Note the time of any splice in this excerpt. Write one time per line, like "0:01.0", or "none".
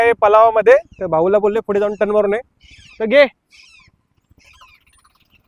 none